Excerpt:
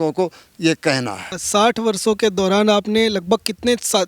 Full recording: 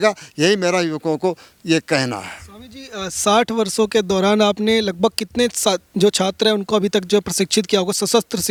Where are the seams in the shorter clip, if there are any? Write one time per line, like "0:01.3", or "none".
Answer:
0:01.3

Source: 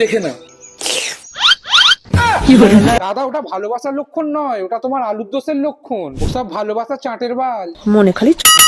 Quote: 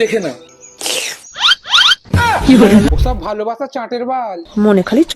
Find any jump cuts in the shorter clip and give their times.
0:02.9

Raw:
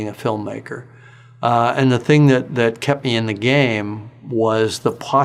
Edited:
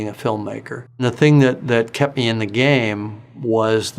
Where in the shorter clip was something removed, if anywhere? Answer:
0:01.0

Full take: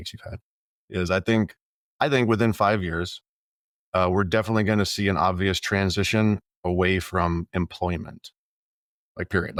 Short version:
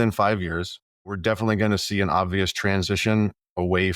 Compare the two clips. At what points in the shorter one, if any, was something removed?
0:01.2

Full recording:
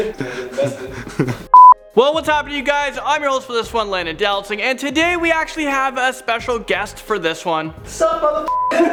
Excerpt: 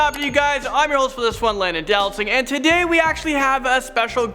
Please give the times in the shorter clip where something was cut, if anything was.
none

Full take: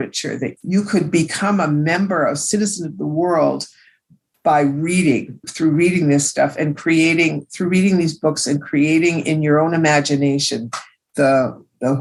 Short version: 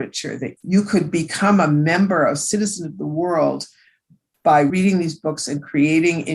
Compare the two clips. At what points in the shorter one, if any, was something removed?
0:04.7

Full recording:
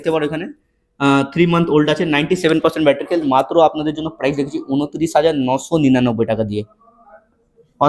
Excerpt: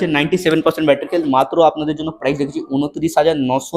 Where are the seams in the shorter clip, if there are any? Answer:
none

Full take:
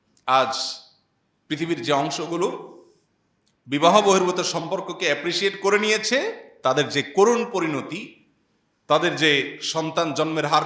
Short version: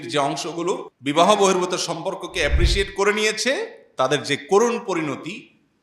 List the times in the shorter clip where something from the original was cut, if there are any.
0:00.9

